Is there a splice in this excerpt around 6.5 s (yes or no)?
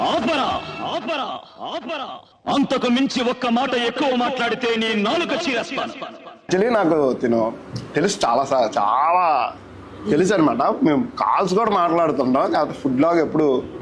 yes